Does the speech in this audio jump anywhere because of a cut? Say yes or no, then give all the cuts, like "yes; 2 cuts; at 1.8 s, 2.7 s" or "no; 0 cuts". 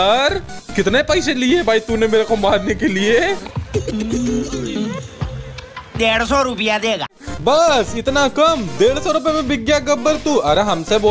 no; 0 cuts